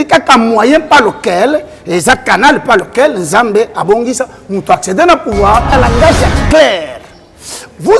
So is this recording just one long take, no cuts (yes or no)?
no